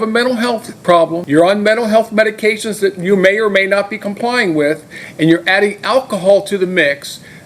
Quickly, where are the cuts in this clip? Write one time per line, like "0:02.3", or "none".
0:01.2